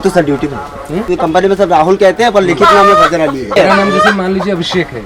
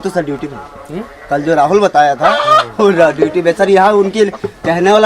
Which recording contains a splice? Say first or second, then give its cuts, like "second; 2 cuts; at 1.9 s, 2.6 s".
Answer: first; 2 cuts; at 1.1 s, 3.6 s